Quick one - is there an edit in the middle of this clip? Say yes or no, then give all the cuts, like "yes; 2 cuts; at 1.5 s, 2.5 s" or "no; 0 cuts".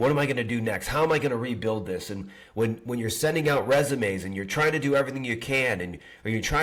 no; 0 cuts